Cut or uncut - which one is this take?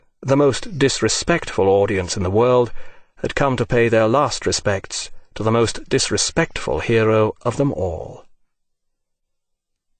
uncut